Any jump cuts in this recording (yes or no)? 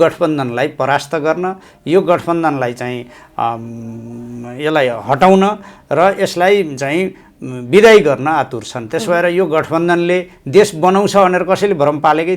no